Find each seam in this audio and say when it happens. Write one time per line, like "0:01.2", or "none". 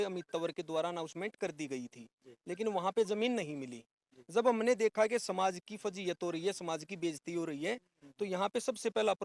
none